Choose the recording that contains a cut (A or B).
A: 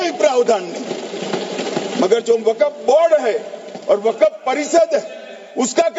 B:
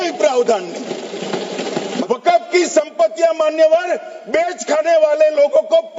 B